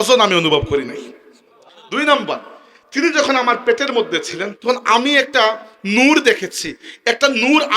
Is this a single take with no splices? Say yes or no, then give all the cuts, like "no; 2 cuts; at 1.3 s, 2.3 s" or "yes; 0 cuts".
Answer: no; 1 cut; at 4.5 s